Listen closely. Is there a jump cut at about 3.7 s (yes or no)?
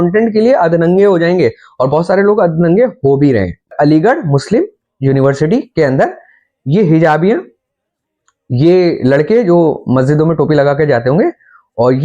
yes